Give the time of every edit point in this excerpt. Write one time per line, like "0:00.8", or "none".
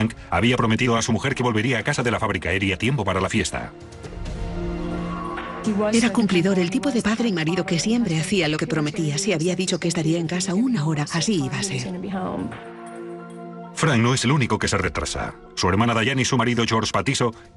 0:14.8